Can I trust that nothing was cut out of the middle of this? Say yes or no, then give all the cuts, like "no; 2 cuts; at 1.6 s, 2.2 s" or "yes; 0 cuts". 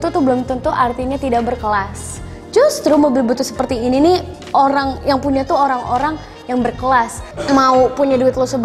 yes; 0 cuts